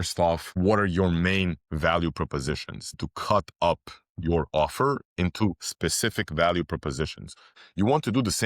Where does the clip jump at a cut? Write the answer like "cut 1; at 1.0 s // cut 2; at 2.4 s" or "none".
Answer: cut 1; at 7.4 s